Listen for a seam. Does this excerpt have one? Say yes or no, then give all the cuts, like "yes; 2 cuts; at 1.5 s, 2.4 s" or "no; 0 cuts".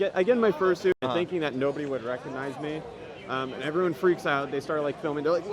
yes; 1 cut; at 0.9 s